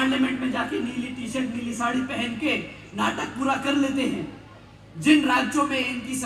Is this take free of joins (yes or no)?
yes